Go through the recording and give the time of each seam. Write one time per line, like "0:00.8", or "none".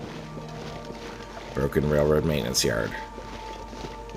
0:01.5
0:03.3